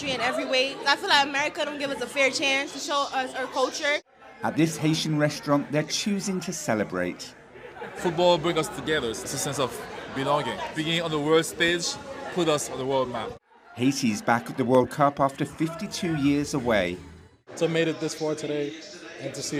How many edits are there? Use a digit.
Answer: 0